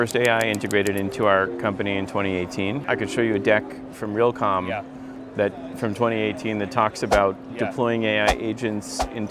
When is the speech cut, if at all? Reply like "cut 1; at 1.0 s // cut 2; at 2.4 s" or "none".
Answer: none